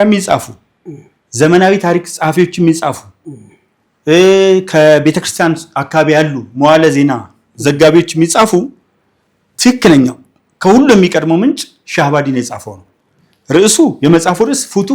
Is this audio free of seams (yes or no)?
yes